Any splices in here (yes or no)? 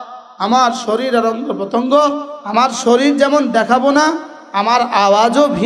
yes